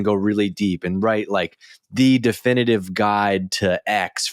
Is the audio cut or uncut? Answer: uncut